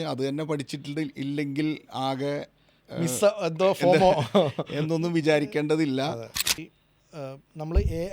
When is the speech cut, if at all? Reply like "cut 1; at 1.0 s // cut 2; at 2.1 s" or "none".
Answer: cut 1; at 6.6 s